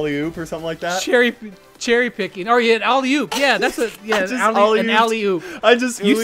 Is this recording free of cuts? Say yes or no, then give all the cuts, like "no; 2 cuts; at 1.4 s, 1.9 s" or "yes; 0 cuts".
yes; 0 cuts